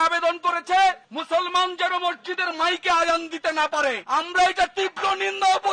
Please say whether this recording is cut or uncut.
uncut